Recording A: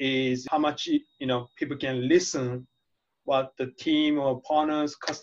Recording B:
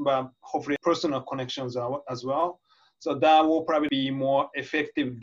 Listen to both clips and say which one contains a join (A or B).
B